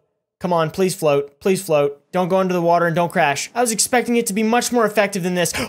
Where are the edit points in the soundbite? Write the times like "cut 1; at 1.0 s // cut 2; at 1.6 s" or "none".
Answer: cut 1; at 3.4 s